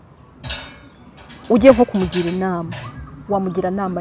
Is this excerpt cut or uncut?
uncut